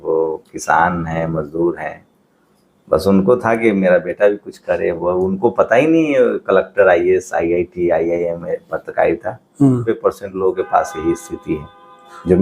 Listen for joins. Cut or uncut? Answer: cut